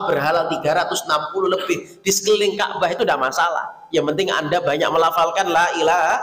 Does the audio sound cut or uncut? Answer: uncut